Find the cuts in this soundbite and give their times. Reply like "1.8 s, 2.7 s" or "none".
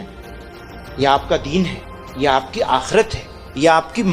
none

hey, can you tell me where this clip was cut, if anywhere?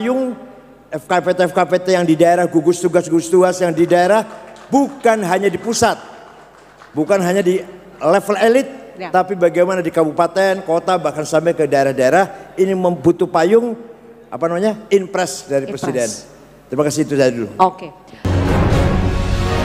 18.2 s

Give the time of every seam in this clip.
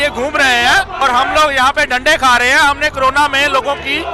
1.0 s

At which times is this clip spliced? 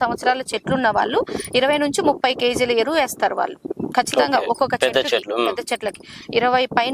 none

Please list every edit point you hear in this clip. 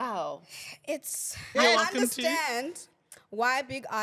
1.4 s

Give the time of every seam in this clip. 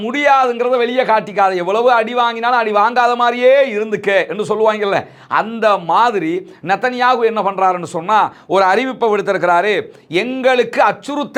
none

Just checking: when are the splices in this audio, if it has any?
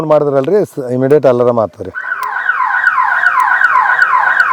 none

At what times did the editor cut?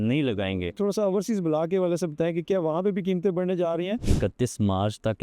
0.8 s, 4.0 s

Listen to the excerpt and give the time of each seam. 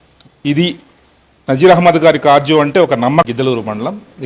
3.3 s

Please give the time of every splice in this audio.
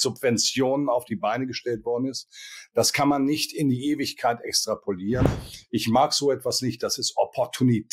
5.3 s

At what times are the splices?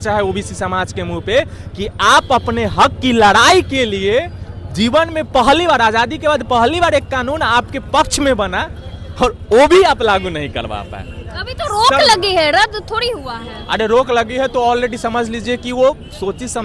none

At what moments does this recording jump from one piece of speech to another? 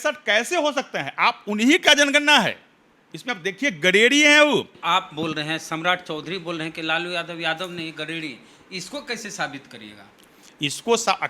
4.7 s

